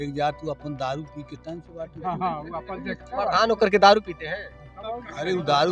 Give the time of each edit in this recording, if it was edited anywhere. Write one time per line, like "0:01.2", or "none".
none